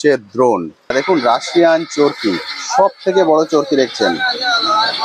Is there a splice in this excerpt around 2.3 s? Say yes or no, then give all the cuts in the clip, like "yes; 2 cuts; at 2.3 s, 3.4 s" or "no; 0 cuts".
no; 1 cut; at 0.9 s